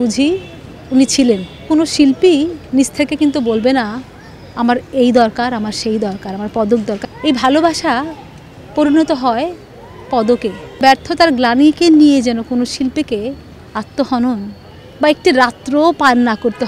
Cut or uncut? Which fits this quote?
cut